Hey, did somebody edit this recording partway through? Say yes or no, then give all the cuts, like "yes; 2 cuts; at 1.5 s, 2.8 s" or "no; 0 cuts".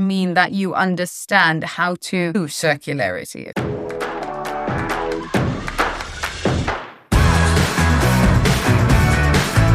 yes; 2 cuts; at 2.4 s, 3.5 s